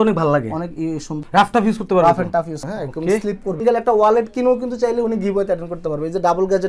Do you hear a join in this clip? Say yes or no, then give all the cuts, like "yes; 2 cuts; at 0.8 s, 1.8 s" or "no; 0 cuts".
yes; 3 cuts; at 1.1 s, 2.6 s, 3.6 s